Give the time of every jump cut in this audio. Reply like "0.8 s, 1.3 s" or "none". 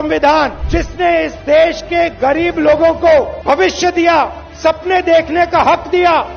none